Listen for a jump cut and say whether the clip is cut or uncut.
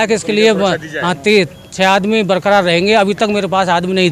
uncut